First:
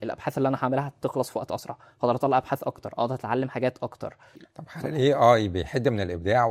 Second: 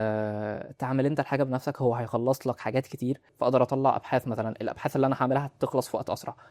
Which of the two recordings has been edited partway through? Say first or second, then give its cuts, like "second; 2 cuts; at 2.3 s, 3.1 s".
second; 1 cut; at 3.3 s